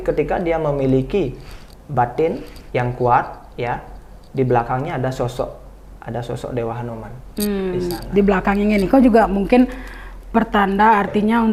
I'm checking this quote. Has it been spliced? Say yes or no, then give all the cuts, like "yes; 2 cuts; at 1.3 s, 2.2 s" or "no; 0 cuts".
no; 0 cuts